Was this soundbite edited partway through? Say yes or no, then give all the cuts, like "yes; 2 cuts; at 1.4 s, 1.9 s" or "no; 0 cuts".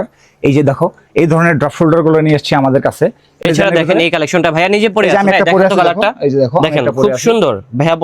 yes; 1 cut; at 3.3 s